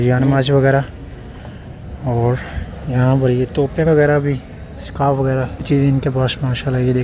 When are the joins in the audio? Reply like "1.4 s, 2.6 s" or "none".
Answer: 5.6 s